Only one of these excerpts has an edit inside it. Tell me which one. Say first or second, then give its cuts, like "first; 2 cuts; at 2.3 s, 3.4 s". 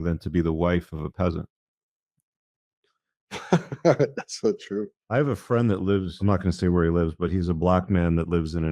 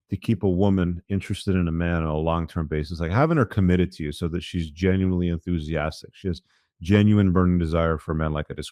first; 2 cuts; at 5.0 s, 6.1 s